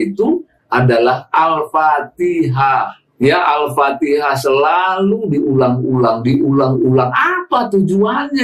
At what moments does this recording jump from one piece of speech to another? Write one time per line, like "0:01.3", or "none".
0:03.0